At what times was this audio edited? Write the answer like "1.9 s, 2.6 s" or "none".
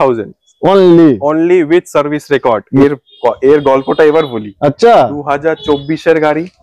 2.8 s